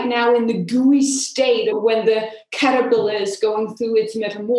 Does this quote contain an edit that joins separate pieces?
yes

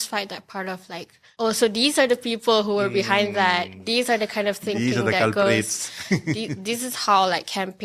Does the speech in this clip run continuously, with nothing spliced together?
no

